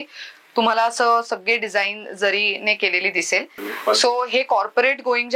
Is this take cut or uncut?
cut